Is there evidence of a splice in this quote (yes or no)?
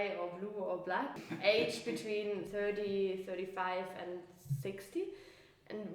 yes